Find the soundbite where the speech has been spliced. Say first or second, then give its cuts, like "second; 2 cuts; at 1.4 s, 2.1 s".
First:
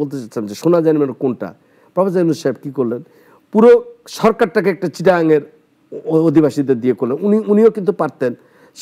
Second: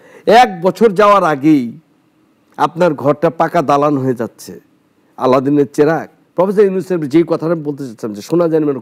second; 1 cut; at 6.2 s